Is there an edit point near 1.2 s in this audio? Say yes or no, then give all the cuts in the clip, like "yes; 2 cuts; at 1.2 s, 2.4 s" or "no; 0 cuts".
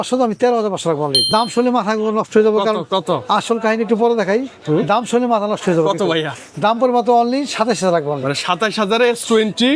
yes; 1 cut; at 1.2 s